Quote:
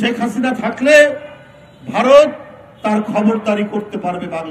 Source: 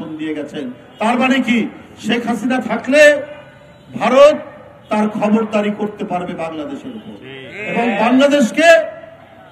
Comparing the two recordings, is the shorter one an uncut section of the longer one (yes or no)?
yes